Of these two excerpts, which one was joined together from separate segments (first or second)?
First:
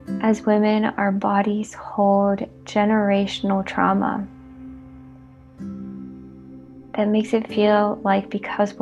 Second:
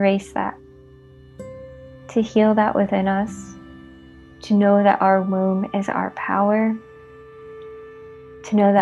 first